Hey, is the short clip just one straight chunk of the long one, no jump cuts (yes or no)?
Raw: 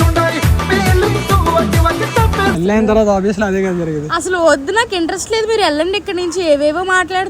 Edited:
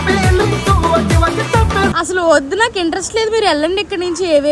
no